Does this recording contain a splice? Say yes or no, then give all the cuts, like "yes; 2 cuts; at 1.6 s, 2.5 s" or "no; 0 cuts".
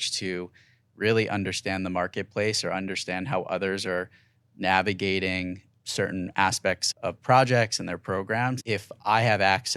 yes; 3 cuts; at 5.7 s, 6.8 s, 8.6 s